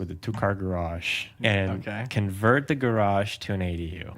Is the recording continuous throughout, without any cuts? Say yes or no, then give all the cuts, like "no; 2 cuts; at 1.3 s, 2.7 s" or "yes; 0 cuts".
no; 1 cut; at 1.4 s